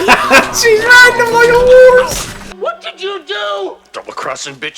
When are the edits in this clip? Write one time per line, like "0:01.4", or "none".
0:02.5